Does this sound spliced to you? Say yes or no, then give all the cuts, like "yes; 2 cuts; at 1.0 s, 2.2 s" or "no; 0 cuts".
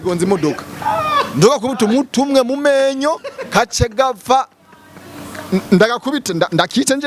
no; 0 cuts